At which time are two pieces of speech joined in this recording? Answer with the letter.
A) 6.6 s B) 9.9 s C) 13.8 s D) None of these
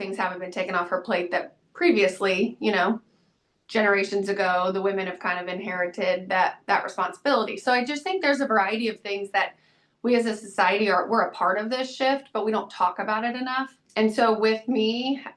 C